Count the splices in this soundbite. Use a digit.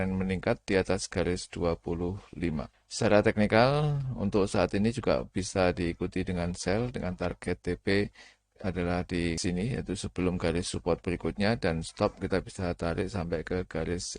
2